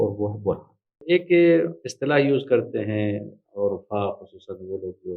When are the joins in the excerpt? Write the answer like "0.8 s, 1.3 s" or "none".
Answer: 1.0 s